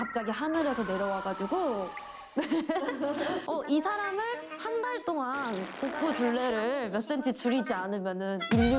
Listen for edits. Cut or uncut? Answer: cut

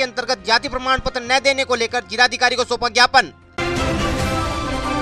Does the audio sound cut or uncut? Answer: uncut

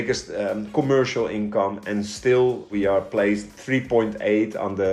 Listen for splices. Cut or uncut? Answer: cut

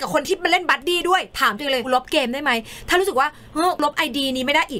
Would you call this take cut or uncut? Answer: cut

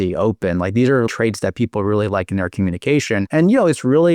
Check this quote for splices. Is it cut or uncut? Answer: cut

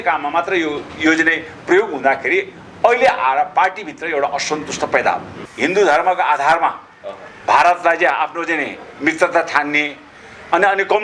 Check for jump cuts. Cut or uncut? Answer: cut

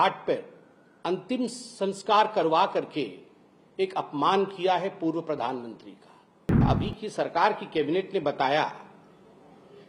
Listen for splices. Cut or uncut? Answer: cut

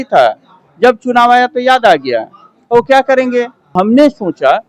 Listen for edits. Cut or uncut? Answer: cut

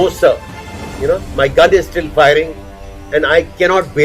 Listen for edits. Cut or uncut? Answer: uncut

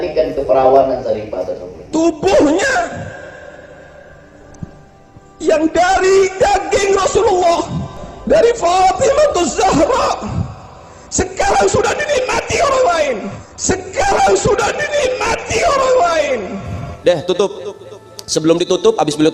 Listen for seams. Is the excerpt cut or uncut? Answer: cut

